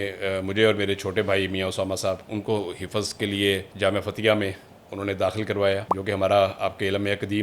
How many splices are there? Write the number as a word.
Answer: two